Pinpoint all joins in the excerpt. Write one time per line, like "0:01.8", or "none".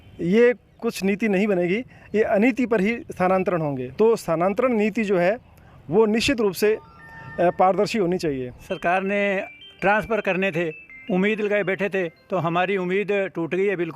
0:03.8
0:08.7